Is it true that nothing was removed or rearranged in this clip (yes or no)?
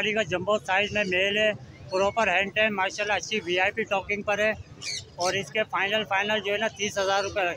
yes